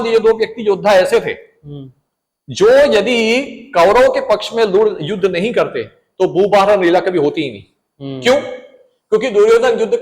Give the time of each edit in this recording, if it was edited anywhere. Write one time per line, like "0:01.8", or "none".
none